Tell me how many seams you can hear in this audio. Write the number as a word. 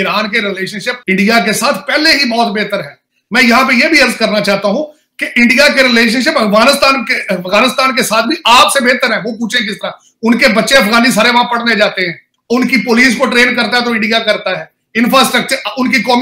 zero